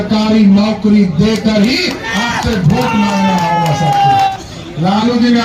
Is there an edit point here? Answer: yes; 1 cut; at 4.3 s

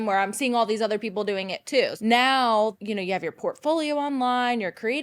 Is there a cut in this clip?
yes; 2 cuts; at 1.9 s, 2.7 s

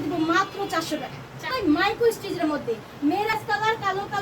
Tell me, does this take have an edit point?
yes; 2 cuts; at 1.5 s, 3.3 s

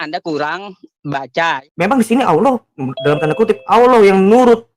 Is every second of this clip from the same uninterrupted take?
no; 1 cut; at 1.6 s

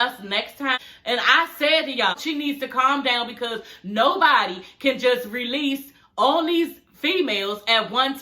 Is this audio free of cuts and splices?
no; 2 cuts; at 0.8 s, 2.1 s

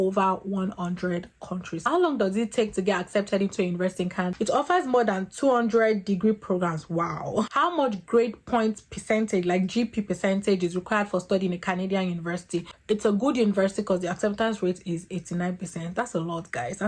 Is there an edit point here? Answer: yes; 4 cuts; at 1.8 s, 4.3 s, 7.5 s, 12.6 s

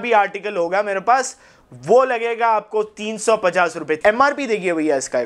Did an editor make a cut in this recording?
yes; 1 cut; at 4.0 s

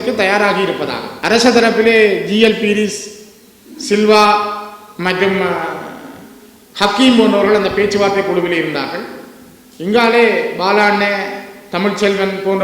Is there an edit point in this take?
yes; 1 cut; at 1.1 s

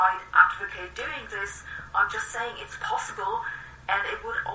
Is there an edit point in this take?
no; 0 cuts

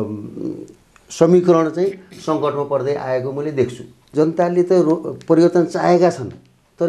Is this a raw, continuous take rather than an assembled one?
no; 1 cut; at 4.1 s

